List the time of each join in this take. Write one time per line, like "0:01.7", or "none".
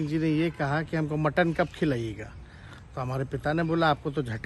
none